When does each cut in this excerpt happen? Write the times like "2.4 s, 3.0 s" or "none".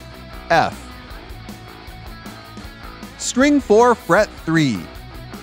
1.1 s, 3.3 s